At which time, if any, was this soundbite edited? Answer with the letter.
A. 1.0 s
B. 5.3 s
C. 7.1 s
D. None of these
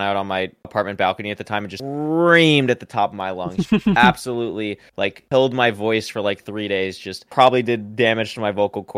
D